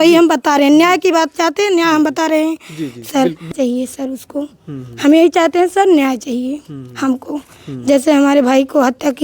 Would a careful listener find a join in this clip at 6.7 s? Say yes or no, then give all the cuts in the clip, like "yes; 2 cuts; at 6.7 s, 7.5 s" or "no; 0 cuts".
no; 1 cut; at 3.5 s